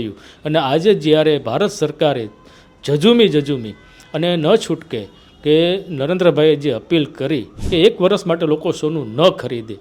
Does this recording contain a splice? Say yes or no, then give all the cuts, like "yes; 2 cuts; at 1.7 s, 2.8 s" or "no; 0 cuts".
yes; 1 cut; at 7.5 s